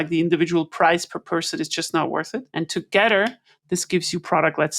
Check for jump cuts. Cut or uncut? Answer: cut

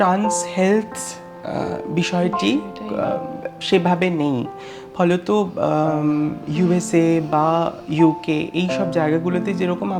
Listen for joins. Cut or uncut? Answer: uncut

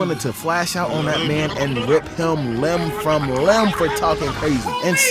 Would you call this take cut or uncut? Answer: uncut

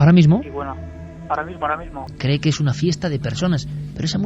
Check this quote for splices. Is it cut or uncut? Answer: cut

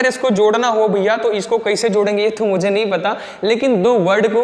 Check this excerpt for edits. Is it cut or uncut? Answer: uncut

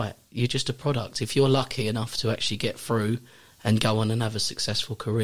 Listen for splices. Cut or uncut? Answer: uncut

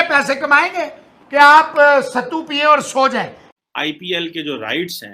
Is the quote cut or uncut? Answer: cut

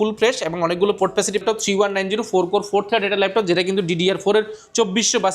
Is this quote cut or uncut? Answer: cut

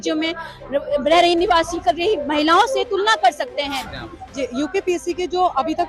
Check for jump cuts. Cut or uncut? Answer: cut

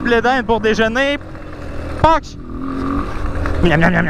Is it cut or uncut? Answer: uncut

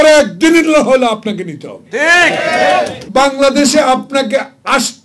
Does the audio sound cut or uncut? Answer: cut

